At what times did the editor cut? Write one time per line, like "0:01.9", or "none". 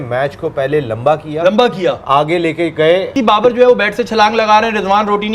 0:03.1